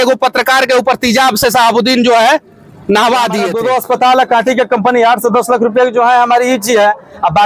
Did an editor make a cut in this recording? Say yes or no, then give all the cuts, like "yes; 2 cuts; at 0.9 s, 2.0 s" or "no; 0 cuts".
yes; 1 cut; at 3.5 s